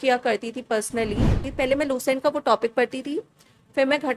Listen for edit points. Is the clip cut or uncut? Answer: cut